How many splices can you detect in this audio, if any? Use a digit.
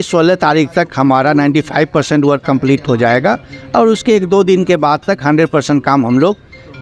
0